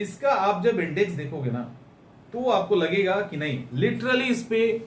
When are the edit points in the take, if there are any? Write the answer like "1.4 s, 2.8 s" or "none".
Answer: none